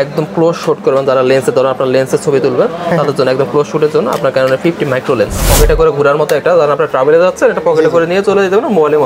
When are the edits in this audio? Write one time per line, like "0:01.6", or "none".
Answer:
0:05.5

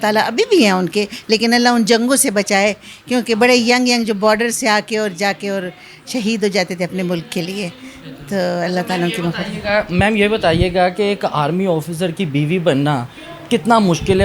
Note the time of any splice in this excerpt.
none

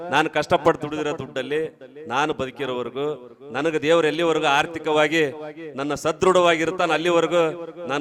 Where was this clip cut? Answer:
none

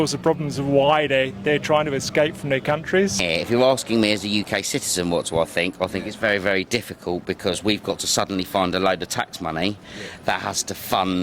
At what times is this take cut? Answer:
0:03.2

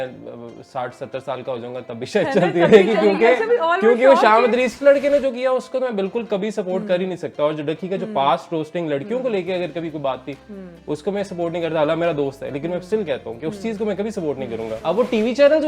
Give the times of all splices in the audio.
0:04.8
0:14.7

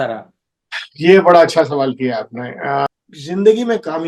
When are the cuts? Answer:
0:02.9

